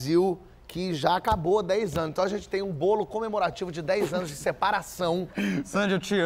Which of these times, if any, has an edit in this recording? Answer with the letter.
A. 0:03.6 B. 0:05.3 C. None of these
B